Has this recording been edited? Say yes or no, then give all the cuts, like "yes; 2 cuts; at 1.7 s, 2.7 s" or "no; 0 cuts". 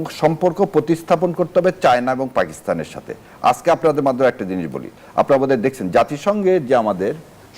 no; 0 cuts